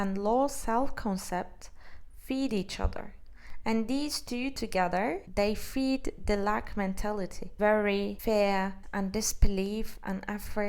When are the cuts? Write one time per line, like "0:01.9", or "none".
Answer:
0:08.8